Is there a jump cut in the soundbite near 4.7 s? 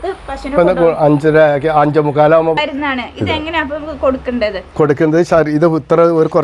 no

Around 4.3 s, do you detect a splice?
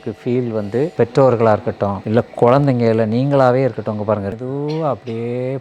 yes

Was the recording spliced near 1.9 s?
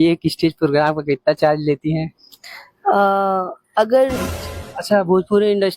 no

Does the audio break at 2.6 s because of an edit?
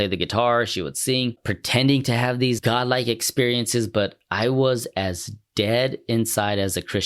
yes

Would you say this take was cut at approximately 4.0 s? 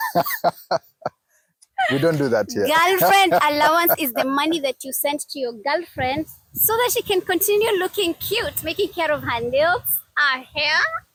no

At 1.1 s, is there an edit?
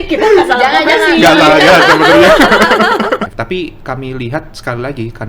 no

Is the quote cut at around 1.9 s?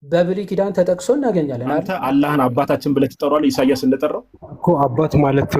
yes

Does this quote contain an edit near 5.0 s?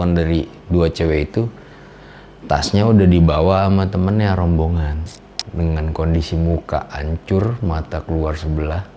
yes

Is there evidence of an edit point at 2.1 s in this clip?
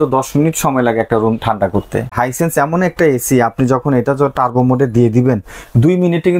yes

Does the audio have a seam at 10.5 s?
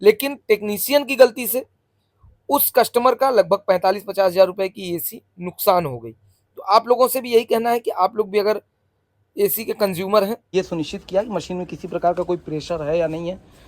yes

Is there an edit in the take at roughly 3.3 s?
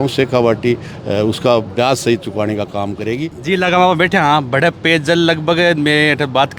yes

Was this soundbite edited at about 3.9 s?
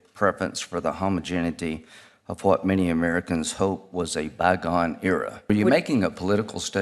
no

